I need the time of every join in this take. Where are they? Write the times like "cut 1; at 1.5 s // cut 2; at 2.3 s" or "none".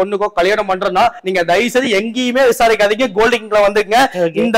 none